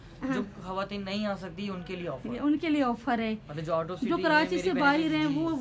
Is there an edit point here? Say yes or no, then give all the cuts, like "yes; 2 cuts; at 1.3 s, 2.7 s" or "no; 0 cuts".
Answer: no; 0 cuts